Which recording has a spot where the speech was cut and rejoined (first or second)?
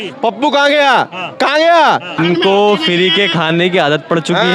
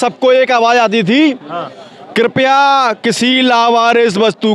first